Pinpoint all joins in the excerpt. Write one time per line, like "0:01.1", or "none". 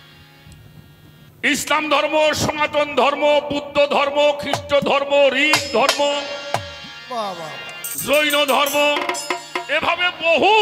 none